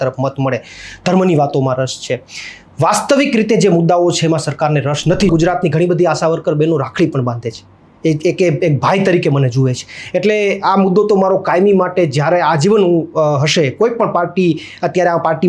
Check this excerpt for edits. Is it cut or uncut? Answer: cut